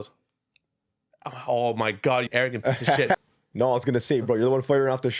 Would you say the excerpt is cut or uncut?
cut